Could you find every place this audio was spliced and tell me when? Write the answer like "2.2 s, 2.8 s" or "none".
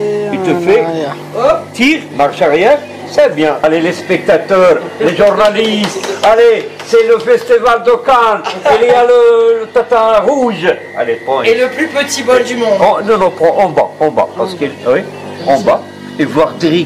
none